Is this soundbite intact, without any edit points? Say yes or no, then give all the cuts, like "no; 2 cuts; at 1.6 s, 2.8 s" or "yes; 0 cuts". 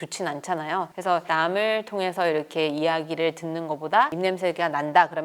no; 2 cuts; at 0.9 s, 4.1 s